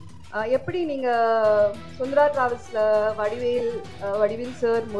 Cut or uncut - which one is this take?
uncut